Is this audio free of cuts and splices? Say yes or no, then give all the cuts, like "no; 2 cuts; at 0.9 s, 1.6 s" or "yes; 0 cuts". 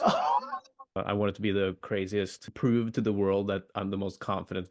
no; 2 cuts; at 1.0 s, 2.4 s